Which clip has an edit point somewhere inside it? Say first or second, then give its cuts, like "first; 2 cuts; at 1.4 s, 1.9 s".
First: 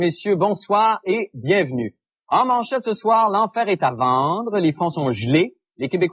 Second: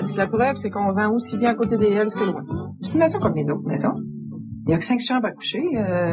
first; 1 cut; at 2.9 s